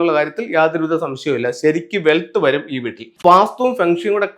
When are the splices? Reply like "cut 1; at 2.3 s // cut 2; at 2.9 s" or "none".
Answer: cut 1; at 3.2 s